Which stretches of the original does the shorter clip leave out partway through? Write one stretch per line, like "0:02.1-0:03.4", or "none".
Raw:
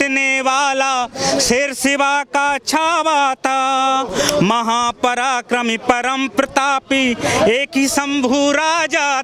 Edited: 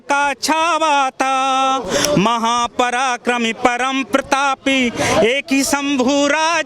none